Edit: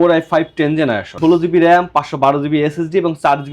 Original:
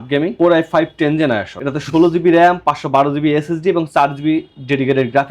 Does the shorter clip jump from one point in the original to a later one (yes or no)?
yes